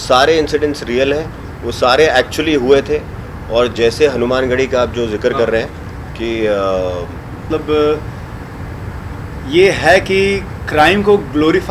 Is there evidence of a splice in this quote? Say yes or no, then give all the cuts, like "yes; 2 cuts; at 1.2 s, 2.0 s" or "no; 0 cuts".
yes; 1 cut; at 7.3 s